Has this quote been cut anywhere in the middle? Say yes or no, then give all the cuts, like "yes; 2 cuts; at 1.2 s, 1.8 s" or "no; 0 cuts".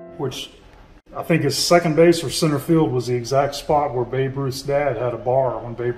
no; 0 cuts